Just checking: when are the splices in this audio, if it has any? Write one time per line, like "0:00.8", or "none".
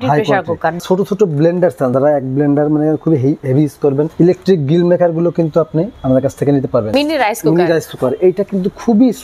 0:00.8
0:01.9
0:04.1
0:05.9
0:06.9